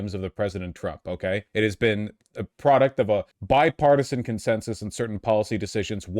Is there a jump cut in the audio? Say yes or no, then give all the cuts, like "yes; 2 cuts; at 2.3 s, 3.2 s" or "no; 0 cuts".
yes; 1 cut; at 1.5 s